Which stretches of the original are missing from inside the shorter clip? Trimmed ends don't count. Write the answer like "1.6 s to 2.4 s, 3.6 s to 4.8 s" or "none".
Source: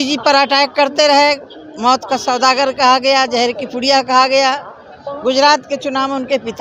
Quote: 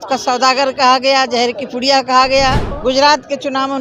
4.7 s to 5.1 s